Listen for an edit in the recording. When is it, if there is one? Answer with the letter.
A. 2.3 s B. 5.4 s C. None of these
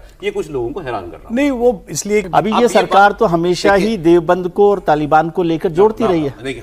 A